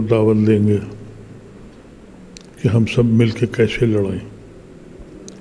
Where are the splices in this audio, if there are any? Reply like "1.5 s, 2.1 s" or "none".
none

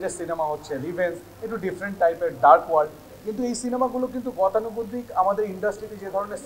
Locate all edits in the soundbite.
none

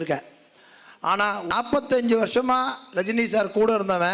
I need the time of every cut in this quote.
1.5 s

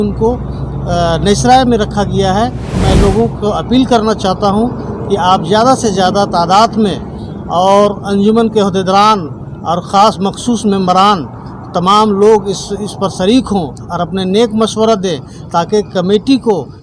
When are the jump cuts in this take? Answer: 2.8 s

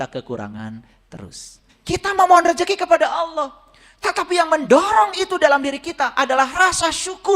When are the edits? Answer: 1.7 s

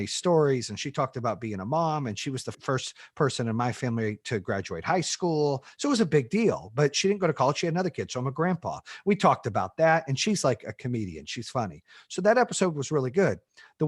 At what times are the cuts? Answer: 2.5 s

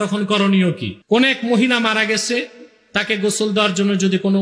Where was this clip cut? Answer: 0.9 s

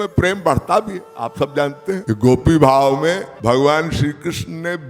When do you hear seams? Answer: 2.0 s, 3.3 s

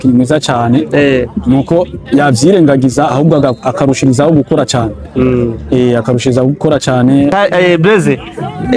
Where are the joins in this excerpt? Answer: 7.3 s

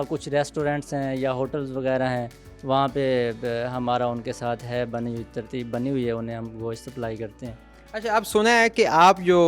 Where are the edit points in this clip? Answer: none

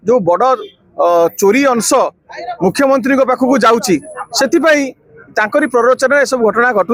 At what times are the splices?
none

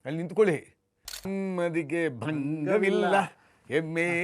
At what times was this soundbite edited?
1.3 s

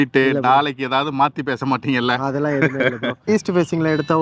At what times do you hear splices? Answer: 3.3 s

